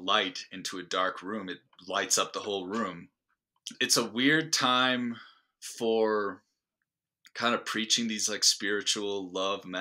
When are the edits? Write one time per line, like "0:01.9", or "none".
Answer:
0:03.7